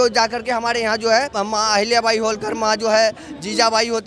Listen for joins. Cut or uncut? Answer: cut